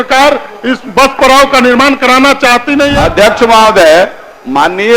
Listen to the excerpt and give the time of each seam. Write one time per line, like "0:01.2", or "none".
0:02.9

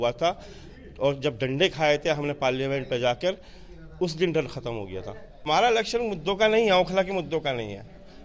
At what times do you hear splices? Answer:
0:05.4

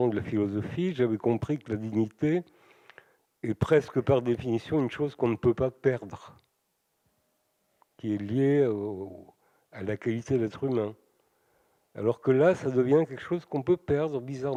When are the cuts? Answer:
none

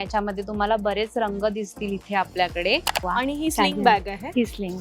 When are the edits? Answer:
0:03.0

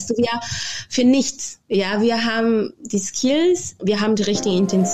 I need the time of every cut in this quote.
0:03.8

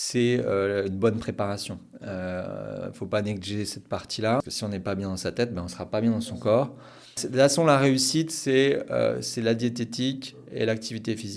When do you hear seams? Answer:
0:04.4
0:07.2

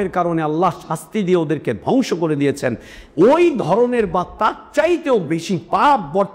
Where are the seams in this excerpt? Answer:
none

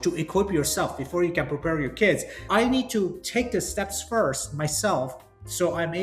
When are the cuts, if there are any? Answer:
0:02.4

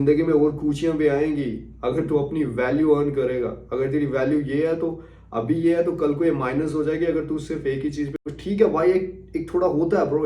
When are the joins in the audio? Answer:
0:08.2

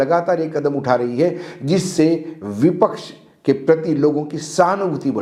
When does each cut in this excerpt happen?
none

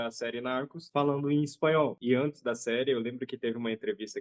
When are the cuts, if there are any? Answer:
none

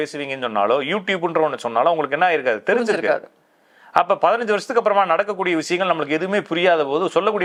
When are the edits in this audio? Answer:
none

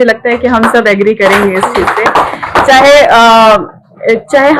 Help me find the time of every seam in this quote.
none

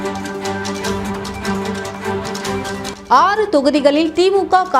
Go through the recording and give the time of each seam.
0:02.9

